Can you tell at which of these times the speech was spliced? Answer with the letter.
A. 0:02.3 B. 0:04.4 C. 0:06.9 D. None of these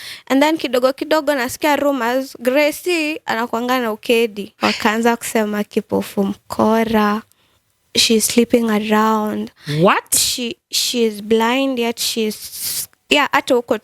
B